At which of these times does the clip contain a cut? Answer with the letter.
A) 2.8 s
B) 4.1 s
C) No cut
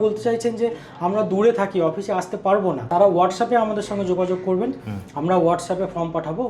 A